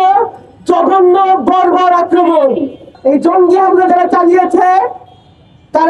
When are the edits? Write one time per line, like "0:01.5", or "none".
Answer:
0:02.9

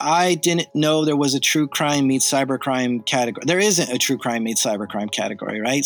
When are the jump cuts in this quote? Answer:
none

